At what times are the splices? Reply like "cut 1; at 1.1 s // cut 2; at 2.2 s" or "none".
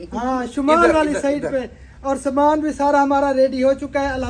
none